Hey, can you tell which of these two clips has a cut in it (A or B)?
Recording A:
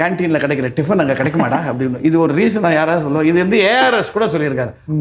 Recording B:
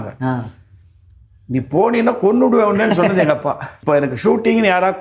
B